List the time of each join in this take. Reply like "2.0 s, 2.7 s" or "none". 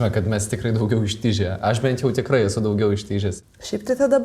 3.3 s